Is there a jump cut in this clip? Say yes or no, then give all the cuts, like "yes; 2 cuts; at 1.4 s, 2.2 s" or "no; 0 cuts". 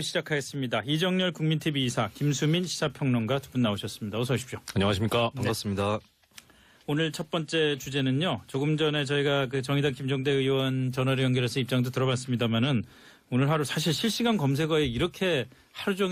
no; 0 cuts